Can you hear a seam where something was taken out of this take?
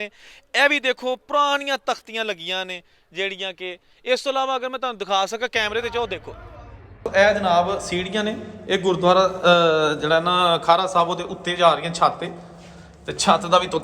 yes; 1 cut; at 6.7 s

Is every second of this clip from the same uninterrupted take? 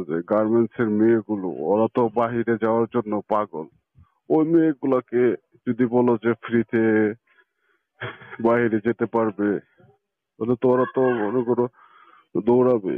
yes; 0 cuts

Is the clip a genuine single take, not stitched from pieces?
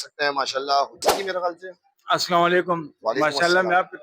no; 1 cut; at 1.0 s

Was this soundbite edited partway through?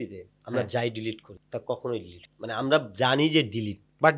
no; 0 cuts

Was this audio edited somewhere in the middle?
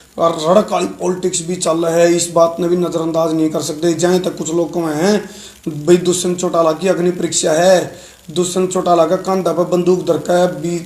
no; 0 cuts

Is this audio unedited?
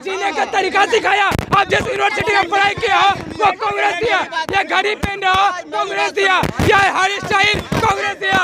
yes; 0 cuts

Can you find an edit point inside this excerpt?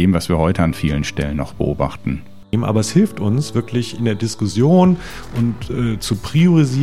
yes; 1 cut; at 2.5 s

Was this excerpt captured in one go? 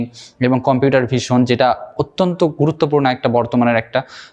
yes; 0 cuts

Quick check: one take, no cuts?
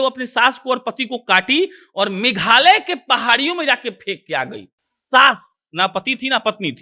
yes; 0 cuts

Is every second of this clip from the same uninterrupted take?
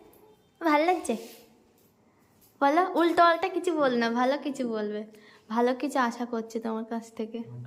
yes; 0 cuts

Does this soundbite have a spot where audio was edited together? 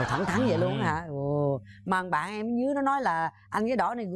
no; 0 cuts

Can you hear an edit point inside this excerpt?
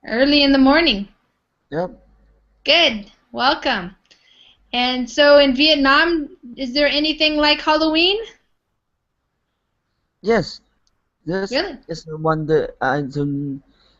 yes; 1 cut; at 5.0 s

